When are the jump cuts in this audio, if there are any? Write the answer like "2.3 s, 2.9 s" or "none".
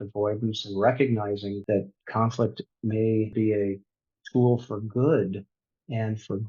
1.5 s, 3.3 s